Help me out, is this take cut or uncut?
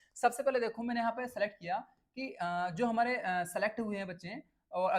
uncut